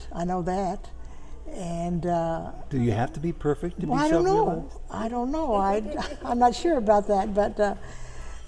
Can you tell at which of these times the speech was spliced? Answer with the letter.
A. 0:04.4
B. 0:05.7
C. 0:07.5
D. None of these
D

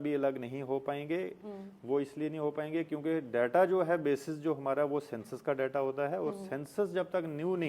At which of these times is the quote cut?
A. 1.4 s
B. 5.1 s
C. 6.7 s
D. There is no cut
D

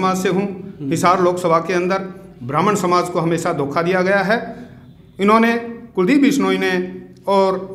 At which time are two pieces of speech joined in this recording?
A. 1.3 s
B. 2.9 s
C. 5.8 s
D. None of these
D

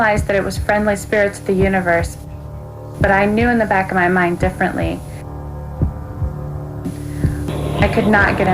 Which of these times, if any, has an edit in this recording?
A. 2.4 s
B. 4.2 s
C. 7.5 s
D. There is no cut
C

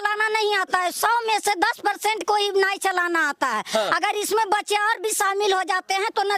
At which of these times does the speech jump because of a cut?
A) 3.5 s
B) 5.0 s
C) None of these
C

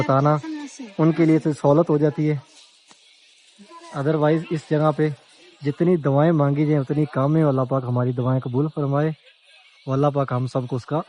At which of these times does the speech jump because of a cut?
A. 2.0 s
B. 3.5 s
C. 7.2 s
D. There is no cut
D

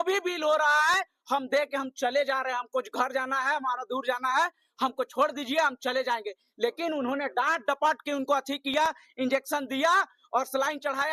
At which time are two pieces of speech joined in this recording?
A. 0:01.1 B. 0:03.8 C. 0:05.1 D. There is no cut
D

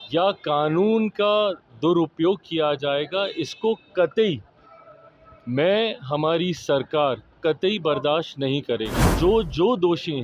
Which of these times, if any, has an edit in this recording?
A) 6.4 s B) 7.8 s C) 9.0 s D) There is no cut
C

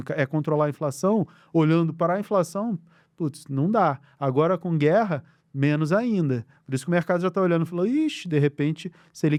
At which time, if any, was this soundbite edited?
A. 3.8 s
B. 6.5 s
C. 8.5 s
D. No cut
D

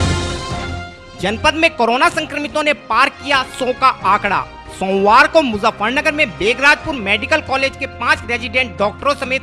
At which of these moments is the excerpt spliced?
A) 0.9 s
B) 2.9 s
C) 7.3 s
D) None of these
A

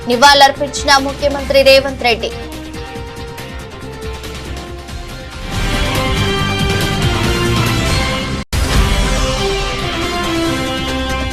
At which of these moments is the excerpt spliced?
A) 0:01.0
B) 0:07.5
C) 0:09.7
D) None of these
B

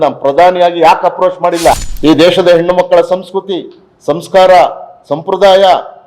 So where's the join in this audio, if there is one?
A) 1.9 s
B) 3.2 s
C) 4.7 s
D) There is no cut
A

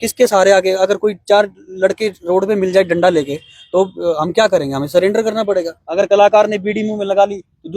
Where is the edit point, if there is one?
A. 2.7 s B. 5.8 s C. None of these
B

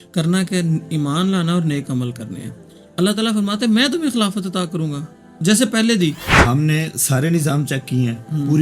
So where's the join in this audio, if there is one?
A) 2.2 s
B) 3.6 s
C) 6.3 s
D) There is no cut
C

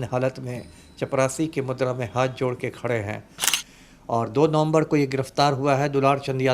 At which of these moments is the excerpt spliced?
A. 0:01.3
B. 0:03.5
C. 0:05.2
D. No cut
B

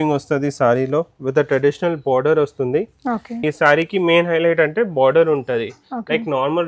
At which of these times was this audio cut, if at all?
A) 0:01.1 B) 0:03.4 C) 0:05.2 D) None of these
B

